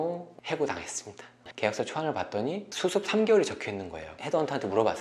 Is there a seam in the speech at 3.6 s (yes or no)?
no